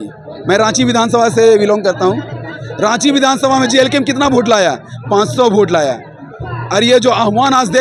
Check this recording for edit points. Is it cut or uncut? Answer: uncut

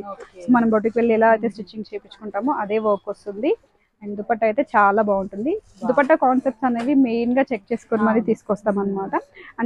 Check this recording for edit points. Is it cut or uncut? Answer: uncut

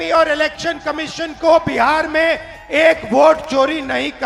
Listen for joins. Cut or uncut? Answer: uncut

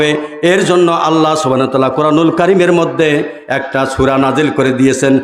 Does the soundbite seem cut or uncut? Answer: uncut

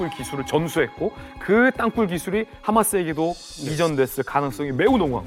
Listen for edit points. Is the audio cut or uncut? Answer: uncut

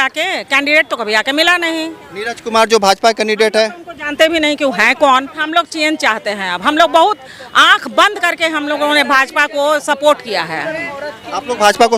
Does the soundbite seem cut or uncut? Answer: cut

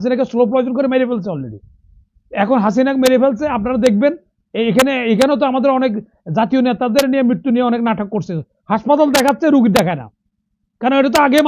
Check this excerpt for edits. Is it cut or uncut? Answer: uncut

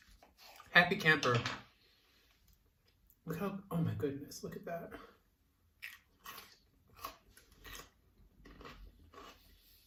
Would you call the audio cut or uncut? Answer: uncut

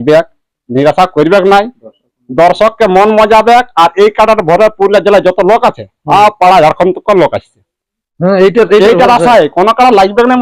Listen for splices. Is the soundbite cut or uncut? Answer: uncut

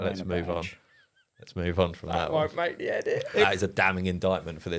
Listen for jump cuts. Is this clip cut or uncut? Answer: cut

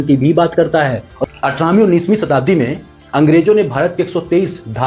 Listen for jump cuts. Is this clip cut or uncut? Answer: cut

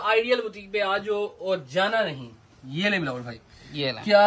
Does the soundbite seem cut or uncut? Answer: uncut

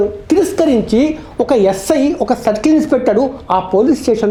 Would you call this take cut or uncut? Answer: uncut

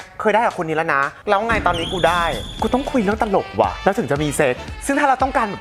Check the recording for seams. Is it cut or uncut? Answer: cut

